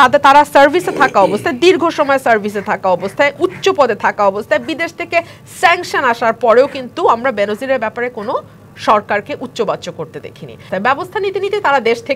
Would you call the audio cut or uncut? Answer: cut